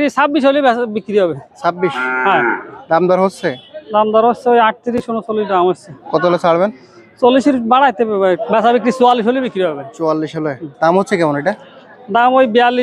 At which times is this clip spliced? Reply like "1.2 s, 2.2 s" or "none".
2.8 s, 8.4 s